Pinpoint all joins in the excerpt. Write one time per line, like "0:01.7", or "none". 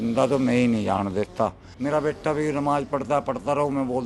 0:01.7